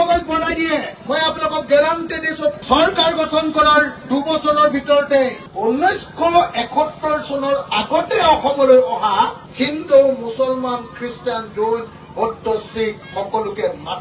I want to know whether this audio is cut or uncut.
cut